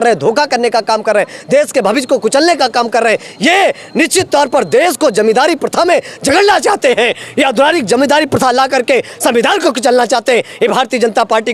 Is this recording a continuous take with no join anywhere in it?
yes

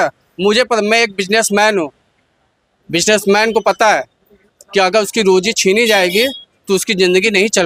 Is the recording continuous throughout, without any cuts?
yes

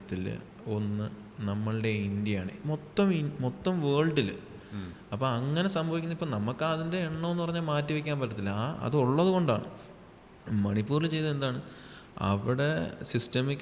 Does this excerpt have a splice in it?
no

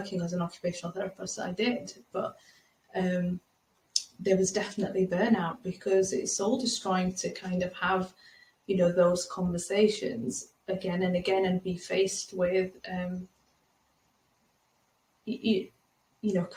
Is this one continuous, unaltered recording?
yes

